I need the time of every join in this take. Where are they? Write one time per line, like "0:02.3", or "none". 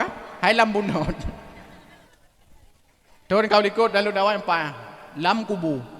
0:02.1